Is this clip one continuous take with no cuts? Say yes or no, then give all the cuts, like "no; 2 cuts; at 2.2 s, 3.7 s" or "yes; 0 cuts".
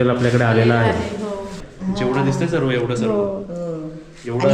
no; 1 cut; at 1.6 s